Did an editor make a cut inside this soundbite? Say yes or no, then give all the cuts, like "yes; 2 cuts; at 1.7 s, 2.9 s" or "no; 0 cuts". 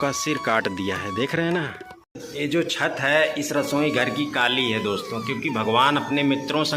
yes; 1 cut; at 2.2 s